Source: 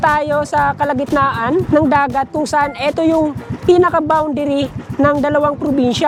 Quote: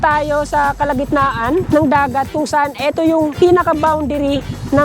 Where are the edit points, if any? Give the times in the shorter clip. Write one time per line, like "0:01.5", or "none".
0:03.3